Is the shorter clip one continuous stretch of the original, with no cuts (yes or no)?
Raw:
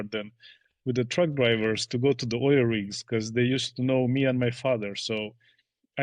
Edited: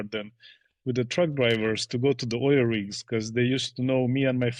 yes